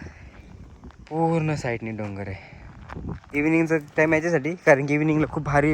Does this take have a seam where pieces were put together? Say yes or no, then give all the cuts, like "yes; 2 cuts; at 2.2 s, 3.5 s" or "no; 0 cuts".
yes; 1 cut; at 3.2 s